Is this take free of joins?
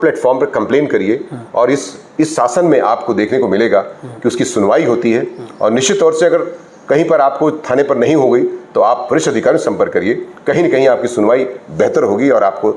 yes; 0 cuts

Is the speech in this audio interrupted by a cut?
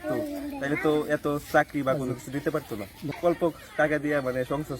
yes; 1 cut; at 3.1 s

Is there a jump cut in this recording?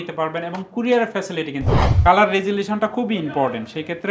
yes; 1 cut; at 1.8 s

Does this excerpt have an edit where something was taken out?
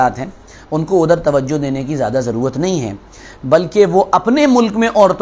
no; 0 cuts

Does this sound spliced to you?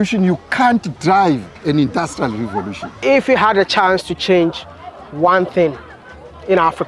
yes; 1 cut; at 3.0 s

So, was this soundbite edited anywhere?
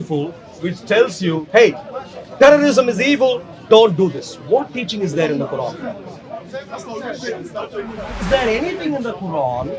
yes; 1 cut; at 8.2 s

